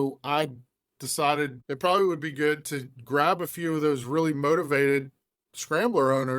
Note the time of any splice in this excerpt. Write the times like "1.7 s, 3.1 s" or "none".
1.6 s